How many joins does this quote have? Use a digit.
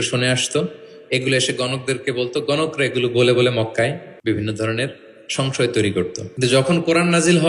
2